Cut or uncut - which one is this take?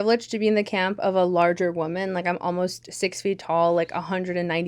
uncut